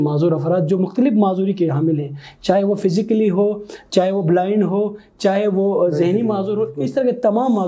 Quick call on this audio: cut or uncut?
uncut